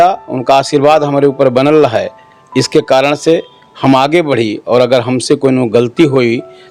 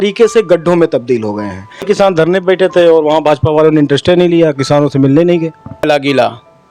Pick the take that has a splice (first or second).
second